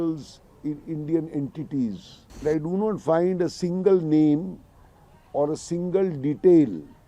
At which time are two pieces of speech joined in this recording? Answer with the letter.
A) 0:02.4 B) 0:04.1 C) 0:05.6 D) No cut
A